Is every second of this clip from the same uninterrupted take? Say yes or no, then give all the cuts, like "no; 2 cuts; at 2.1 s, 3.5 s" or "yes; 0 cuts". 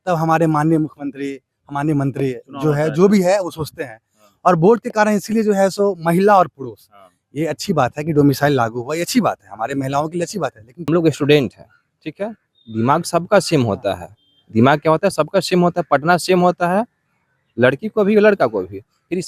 no; 1 cut; at 10.9 s